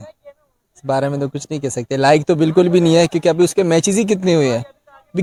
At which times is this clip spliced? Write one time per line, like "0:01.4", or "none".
none